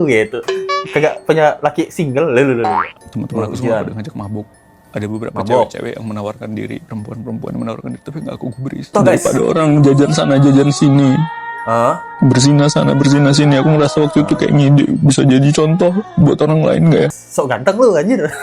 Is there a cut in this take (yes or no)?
yes